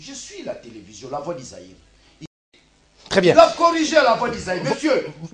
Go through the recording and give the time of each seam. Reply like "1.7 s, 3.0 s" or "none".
2.3 s